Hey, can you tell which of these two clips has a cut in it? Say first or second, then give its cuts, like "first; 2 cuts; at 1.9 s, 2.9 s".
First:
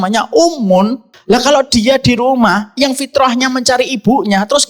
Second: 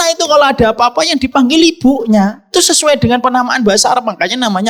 first; 1 cut; at 1.1 s